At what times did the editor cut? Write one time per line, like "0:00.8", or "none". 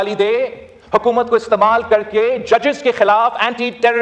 none